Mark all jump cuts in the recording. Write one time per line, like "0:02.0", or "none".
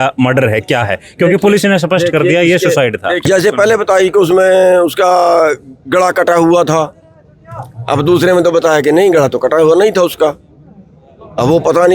0:03.2